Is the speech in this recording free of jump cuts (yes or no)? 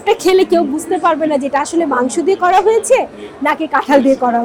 yes